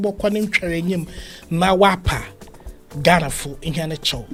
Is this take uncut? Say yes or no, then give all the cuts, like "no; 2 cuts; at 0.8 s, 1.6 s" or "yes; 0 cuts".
yes; 0 cuts